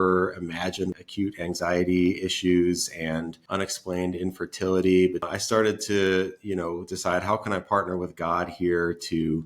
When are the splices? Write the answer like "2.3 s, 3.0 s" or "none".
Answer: 1.0 s, 3.4 s, 5.3 s